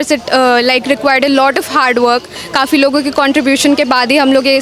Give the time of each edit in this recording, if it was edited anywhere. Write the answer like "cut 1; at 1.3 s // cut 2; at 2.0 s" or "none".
none